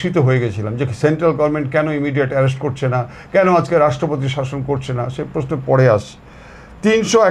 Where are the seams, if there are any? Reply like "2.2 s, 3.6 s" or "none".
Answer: none